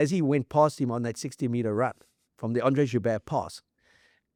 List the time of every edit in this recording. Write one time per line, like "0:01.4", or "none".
none